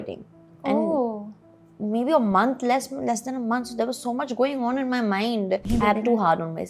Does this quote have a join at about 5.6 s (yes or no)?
yes